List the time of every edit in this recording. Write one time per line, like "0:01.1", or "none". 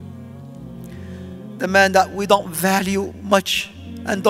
0:01.6